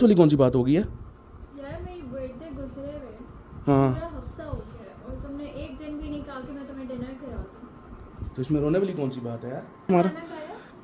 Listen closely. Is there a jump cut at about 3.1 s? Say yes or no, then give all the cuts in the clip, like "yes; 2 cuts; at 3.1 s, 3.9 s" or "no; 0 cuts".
no; 1 cut; at 9.9 s